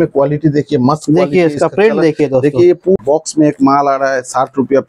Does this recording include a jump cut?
yes; 1 cut; at 3.0 s

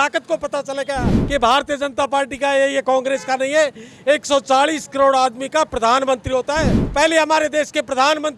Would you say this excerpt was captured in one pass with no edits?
no; 2 cuts; at 1.1 s, 6.8 s

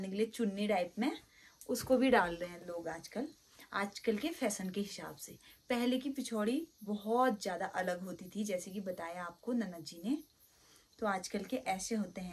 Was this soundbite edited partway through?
no; 0 cuts

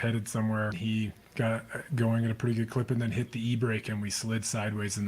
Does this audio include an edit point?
yes; 1 cut; at 1.1 s

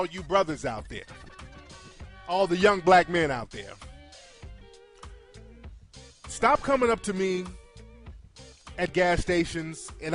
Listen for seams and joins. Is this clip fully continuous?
yes; 0 cuts

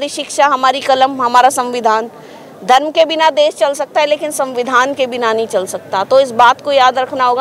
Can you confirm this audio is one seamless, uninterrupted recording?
yes; 0 cuts

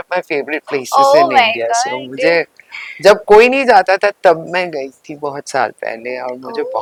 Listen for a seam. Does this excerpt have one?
no; 0 cuts

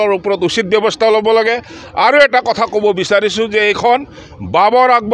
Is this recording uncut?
yes; 0 cuts

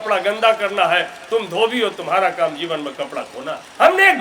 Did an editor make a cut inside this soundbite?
no; 0 cuts

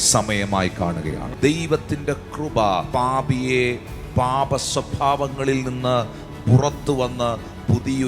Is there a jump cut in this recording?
yes; 2 cuts; at 1.3 s, 2.9 s

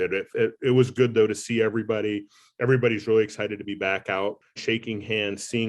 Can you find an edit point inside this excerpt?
yes; 1 cut; at 4.6 s

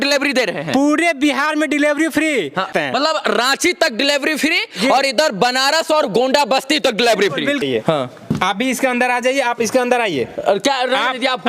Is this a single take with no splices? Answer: no; 2 cuts; at 2.7 s, 7.6 s

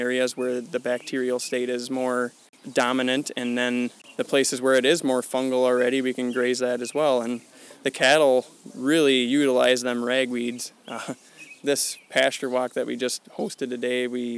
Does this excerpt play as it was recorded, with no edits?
yes; 0 cuts

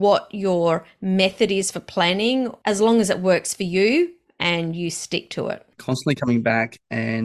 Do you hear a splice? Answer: yes; 2 cuts; at 2.6 s, 6.0 s

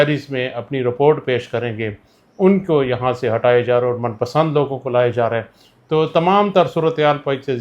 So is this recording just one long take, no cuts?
yes; 0 cuts

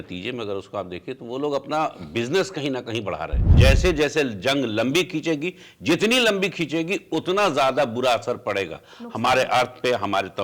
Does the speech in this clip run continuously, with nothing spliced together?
no; 1 cut; at 3.5 s

